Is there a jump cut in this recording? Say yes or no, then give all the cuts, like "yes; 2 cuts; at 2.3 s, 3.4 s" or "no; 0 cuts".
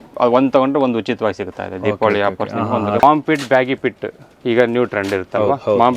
yes; 1 cut; at 3.0 s